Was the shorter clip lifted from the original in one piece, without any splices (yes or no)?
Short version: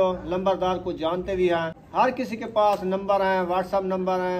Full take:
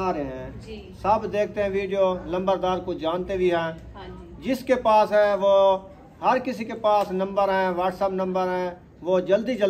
no